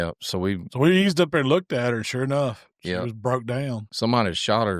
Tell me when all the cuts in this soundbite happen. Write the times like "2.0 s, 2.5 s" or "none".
3.9 s